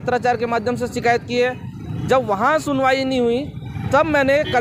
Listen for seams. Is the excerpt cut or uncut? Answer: uncut